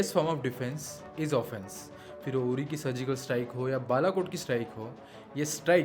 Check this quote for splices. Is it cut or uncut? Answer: uncut